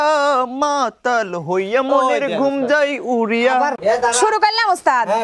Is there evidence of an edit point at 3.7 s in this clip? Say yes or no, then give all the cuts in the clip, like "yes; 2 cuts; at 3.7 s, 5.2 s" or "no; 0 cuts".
yes; 1 cut; at 3.7 s